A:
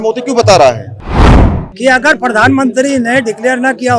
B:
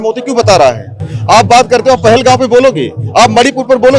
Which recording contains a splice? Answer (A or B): A